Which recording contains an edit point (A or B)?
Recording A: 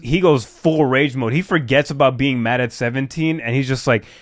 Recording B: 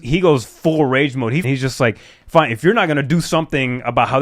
B